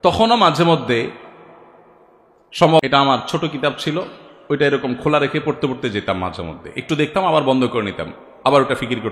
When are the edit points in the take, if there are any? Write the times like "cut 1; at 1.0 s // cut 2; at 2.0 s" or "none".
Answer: cut 1; at 2.8 s